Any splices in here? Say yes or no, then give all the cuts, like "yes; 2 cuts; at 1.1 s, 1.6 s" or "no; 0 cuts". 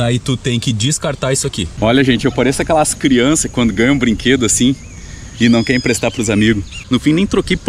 yes; 2 cuts; at 1.7 s, 6.8 s